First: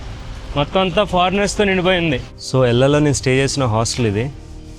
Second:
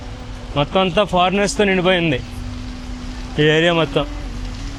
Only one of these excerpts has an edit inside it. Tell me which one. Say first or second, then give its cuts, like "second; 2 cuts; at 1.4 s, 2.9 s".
first; 1 cut; at 2.3 s